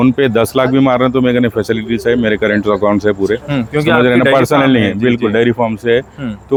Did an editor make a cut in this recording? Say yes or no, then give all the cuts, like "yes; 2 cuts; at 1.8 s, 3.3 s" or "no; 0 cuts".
no; 0 cuts